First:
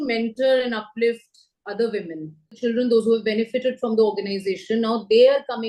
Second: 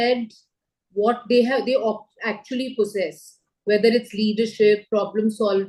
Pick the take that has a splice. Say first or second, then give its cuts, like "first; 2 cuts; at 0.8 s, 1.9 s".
first; 1 cut; at 2.6 s